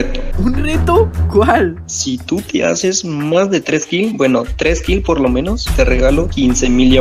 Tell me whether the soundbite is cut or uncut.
uncut